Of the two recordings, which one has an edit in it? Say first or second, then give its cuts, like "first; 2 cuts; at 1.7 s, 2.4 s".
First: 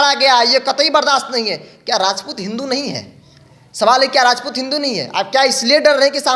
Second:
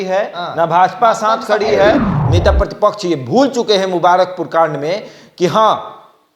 second; 1 cut; at 2.2 s